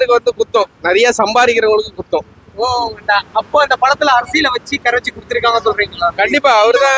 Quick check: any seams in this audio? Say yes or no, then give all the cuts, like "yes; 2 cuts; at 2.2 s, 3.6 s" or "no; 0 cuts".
no; 0 cuts